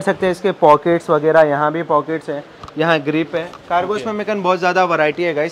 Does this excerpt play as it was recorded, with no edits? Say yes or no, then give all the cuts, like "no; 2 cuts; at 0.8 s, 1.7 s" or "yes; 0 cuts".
yes; 0 cuts